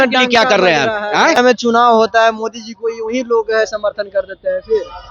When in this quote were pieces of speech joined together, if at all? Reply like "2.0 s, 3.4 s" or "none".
1.4 s